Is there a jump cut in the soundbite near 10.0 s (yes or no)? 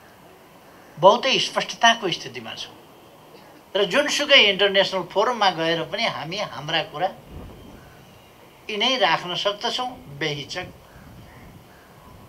no